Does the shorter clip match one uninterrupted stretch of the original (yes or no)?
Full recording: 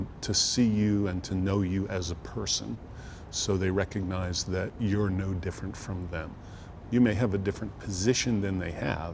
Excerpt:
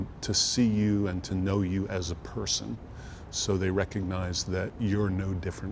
yes